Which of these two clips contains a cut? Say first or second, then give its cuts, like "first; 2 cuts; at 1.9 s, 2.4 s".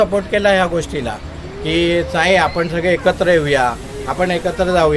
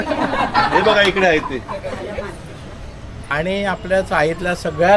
second; 1 cut; at 3.3 s